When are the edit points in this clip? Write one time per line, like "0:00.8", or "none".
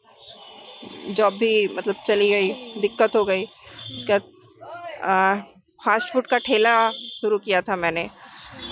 none

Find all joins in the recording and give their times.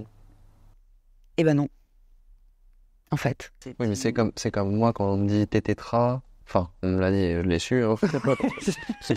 0:03.6
0:06.3

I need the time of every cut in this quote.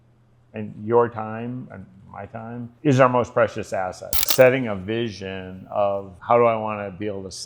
0:02.7
0:04.3
0:06.1

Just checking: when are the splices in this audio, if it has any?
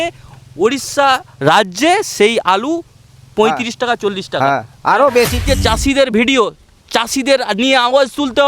0:05.4

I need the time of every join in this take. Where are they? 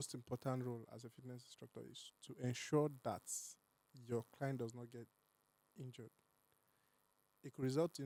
none

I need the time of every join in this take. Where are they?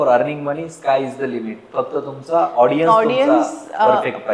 none

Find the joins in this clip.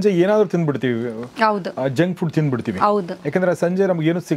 none

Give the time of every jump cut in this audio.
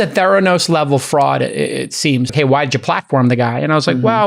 0:02.3

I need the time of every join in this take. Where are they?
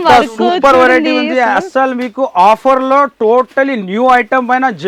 none

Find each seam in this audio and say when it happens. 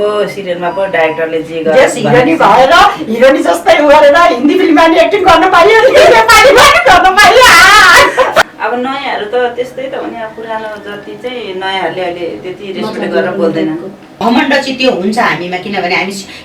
0:08.4
0:14.1

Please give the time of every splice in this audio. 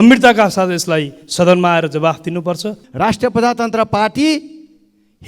0:02.8

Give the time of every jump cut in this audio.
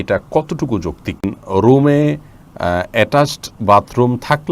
0:01.4

